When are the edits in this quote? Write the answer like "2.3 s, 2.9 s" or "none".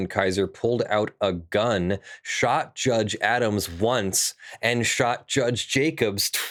none